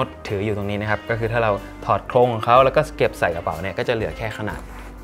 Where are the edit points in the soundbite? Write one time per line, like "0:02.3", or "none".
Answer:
none